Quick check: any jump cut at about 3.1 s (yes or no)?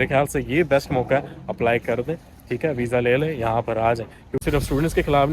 no